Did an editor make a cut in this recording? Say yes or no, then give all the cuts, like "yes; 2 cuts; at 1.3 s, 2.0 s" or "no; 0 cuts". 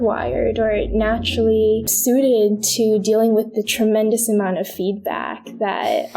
yes; 1 cut; at 1.9 s